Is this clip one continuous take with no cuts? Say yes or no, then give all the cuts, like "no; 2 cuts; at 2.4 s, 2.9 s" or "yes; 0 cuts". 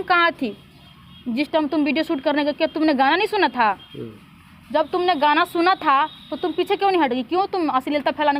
yes; 0 cuts